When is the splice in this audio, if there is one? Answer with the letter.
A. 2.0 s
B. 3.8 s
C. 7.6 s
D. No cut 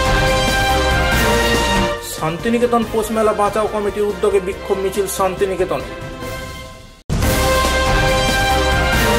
A